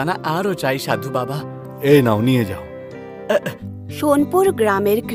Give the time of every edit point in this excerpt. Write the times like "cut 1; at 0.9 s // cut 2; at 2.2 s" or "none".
cut 1; at 3.6 s